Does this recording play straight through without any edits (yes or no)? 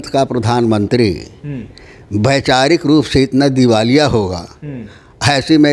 yes